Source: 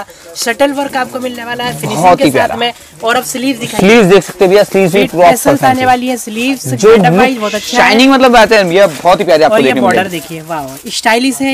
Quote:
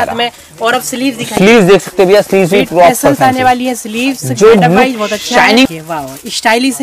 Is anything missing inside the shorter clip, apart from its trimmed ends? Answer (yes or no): yes